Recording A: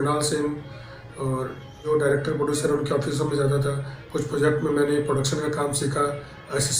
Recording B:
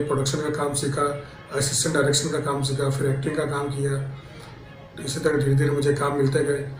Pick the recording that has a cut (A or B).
A